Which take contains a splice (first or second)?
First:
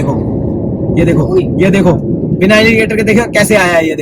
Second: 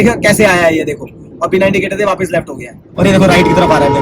second